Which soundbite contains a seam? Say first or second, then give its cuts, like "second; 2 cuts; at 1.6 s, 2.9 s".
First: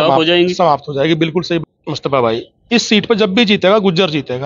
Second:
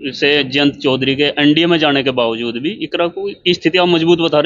first; 1 cut; at 1.6 s